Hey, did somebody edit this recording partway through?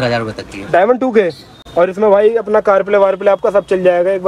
no; 0 cuts

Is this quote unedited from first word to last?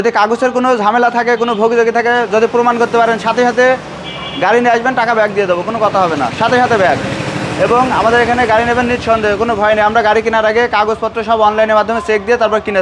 yes; 0 cuts

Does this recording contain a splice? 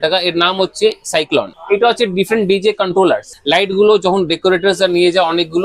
yes; 2 cuts; at 1.5 s, 3.3 s

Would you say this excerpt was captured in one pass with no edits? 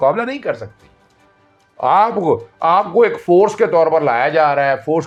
yes; 0 cuts

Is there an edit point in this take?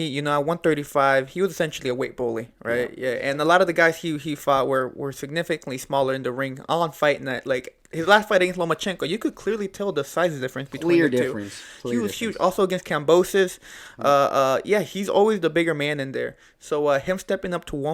no; 0 cuts

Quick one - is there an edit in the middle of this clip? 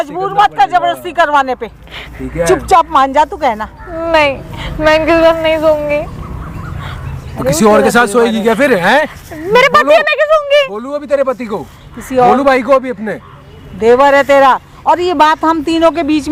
no; 0 cuts

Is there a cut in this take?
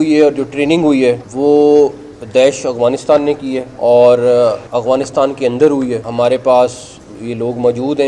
yes; 4 cuts; at 1.3 s, 3.7 s, 4.6 s, 6.1 s

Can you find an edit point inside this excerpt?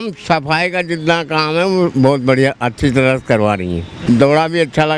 yes; 1 cut; at 3.9 s

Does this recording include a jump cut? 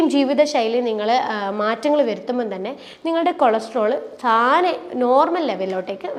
no; 0 cuts

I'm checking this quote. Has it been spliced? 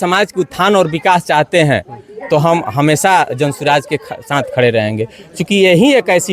no; 0 cuts

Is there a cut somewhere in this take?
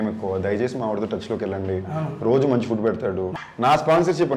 yes; 1 cut; at 3.5 s

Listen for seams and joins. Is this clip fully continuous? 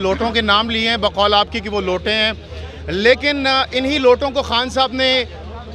yes; 0 cuts

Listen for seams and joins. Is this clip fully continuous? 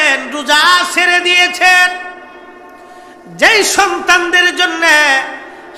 yes; 0 cuts

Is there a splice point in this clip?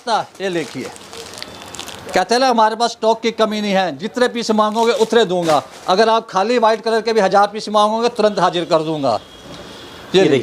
no; 0 cuts

